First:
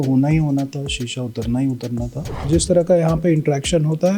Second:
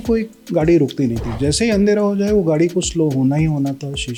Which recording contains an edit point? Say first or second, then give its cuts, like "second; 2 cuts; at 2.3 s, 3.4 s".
first; 1 cut; at 2.5 s